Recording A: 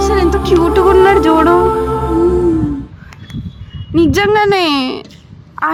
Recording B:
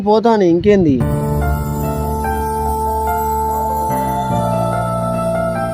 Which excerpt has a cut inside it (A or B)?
B